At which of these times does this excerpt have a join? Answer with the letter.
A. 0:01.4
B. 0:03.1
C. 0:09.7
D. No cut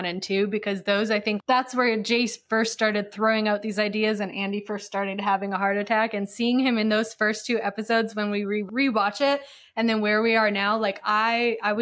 A